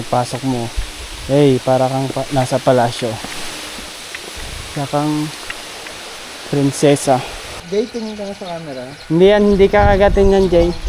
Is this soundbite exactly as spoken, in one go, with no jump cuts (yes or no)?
no